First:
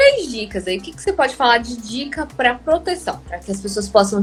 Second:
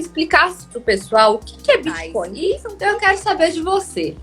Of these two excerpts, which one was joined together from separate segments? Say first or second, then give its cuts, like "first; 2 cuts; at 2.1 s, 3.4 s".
second; 1 cut; at 2.3 s